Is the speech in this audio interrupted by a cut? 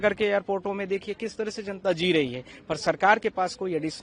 no; 0 cuts

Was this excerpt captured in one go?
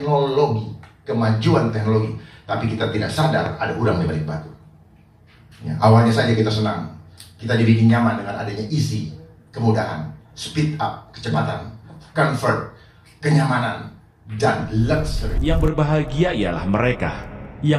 no; 1 cut; at 15.2 s

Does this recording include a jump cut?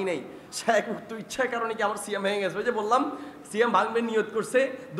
no; 0 cuts

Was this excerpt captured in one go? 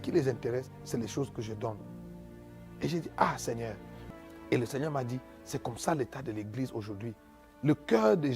no; 1 cut; at 3.9 s

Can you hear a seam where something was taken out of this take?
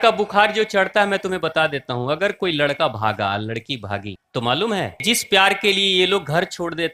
yes; 2 cuts; at 4.2 s, 5.0 s

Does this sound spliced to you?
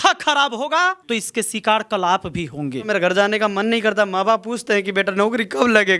yes; 2 cuts; at 1.0 s, 2.9 s

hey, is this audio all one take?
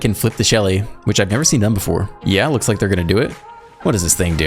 no; 1 cut; at 2.1 s

